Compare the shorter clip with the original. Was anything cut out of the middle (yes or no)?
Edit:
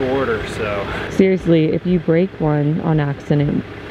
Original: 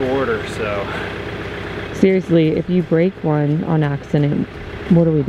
yes